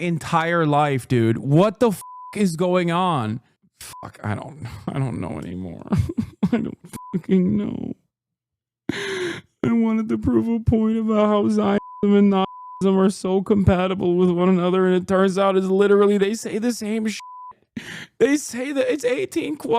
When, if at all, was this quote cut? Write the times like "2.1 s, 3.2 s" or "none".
3.5 s